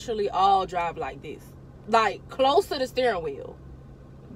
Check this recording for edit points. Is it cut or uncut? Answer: uncut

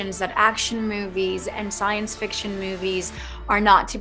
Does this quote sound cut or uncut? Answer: uncut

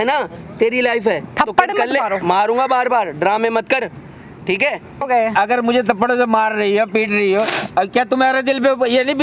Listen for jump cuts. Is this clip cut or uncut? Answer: cut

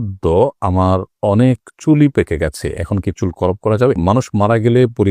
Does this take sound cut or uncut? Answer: cut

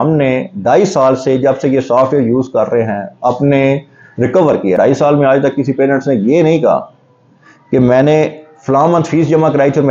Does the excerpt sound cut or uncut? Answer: cut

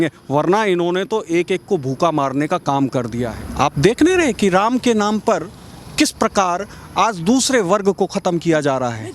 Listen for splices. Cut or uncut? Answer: cut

